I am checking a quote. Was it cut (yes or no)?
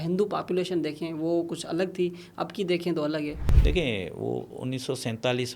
yes